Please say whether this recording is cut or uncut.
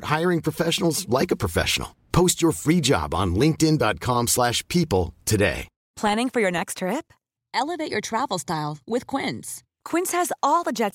cut